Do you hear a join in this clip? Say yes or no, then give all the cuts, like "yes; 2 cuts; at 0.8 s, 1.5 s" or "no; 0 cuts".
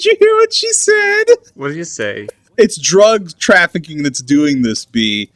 yes; 1 cut; at 2.3 s